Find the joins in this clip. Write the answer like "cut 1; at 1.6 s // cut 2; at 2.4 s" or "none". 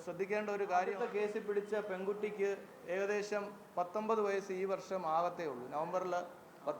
cut 1; at 1.0 s